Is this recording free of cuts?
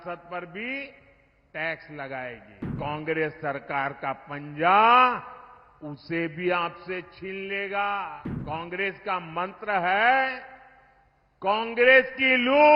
no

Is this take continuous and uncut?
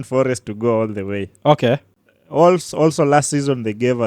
no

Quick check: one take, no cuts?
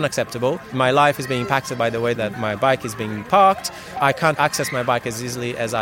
no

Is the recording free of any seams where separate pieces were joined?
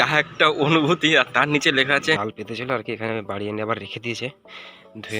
no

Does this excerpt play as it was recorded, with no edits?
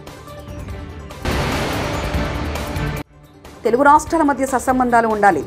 no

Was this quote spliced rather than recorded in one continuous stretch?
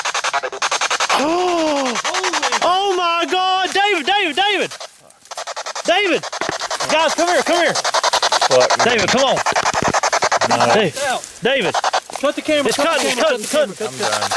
no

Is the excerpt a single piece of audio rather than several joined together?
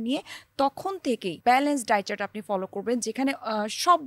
no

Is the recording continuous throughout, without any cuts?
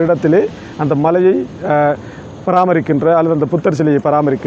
yes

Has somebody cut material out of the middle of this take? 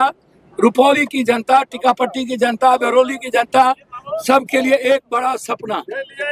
no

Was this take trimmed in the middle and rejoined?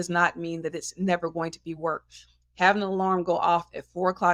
no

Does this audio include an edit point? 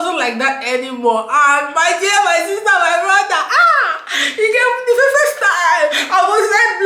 no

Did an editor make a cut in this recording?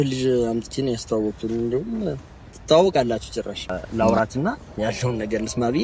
yes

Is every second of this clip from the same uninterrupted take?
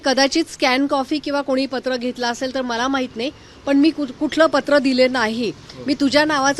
yes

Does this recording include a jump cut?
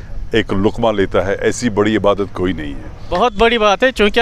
yes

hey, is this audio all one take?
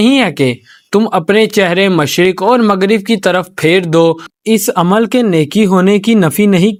yes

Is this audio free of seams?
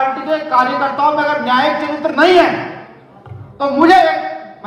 yes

